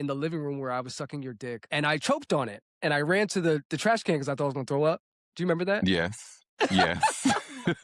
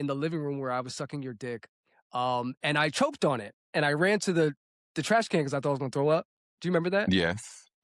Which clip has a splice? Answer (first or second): first